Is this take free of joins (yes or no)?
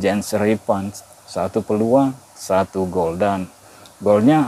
no